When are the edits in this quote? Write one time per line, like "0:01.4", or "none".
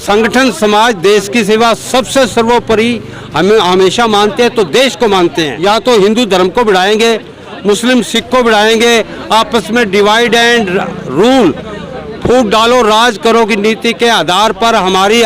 0:05.5